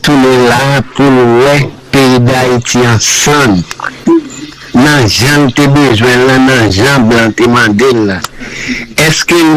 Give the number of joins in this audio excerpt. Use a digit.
0